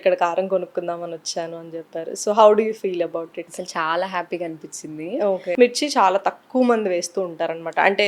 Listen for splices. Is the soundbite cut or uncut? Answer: cut